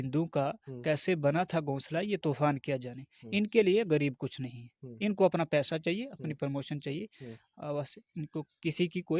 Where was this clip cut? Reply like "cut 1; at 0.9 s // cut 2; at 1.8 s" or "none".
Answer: none